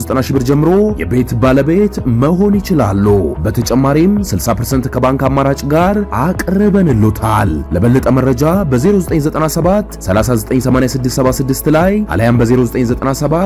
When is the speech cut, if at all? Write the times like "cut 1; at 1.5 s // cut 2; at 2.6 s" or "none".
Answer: none